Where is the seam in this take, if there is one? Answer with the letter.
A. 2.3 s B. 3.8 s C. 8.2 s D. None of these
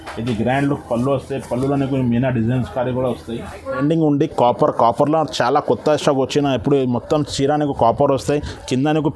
B